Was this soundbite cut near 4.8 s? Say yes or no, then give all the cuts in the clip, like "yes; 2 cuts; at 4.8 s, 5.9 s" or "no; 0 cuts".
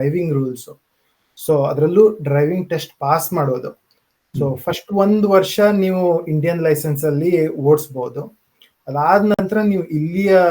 no; 0 cuts